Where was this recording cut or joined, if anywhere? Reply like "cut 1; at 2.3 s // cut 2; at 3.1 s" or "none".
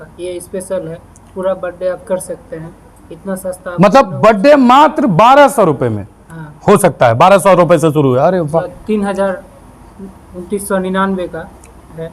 cut 1; at 8.8 s